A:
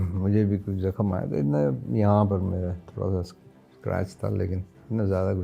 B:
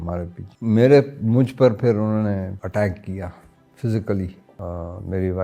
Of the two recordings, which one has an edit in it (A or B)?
B